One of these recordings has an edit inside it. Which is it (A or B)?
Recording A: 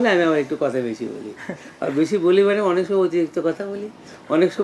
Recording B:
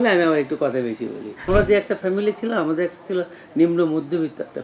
B